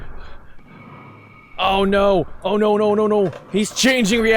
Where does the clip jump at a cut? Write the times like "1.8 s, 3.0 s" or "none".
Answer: 3.4 s

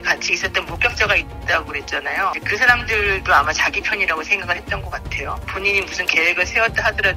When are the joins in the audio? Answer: 5.5 s

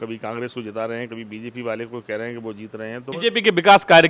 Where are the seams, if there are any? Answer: 3.1 s

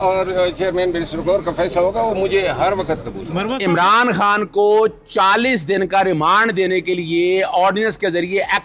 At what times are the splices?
3.5 s

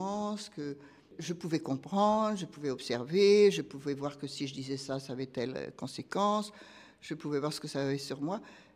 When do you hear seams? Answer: none

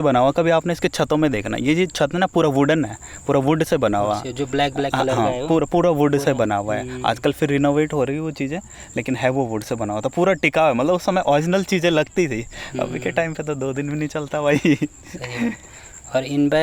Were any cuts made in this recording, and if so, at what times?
none

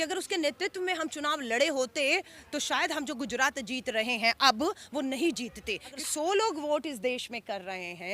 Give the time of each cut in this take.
6.0 s

